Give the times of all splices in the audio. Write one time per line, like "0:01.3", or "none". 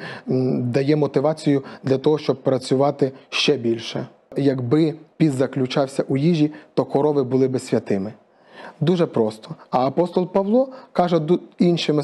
0:04.3

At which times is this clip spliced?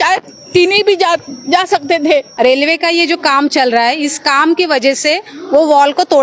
0:02.3

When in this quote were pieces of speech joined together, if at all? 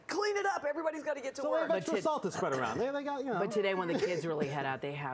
0:02.8

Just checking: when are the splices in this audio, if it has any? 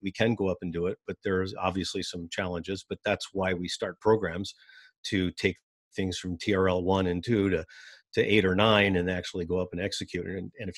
none

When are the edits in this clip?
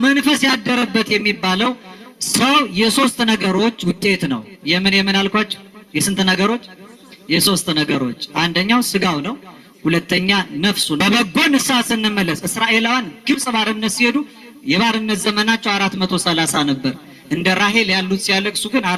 0:11.0

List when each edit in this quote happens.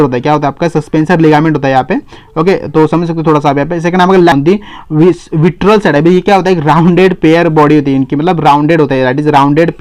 0:04.3

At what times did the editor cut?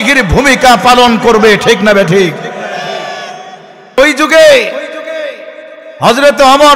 0:04.0

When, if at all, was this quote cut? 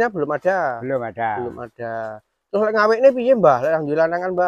none

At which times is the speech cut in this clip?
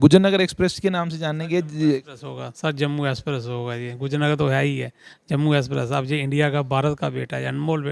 none

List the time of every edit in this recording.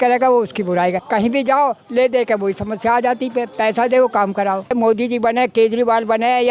0:01.0
0:04.7

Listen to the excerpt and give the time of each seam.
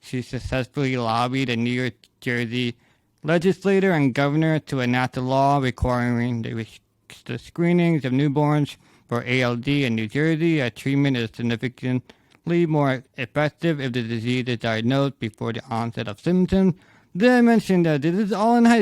none

